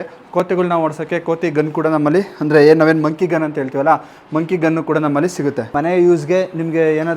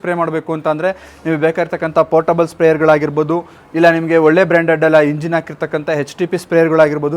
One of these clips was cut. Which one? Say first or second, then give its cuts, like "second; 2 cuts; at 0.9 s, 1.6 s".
first; 1 cut; at 5.7 s